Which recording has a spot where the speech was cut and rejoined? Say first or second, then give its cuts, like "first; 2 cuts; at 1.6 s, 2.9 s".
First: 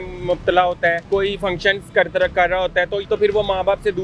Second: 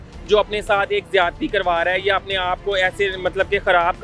first; 2 cuts; at 1.0 s, 3.0 s